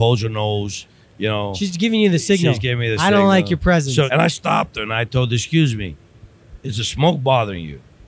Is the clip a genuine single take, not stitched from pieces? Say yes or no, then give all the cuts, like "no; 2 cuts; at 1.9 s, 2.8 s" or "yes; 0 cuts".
no; 1 cut; at 4.1 s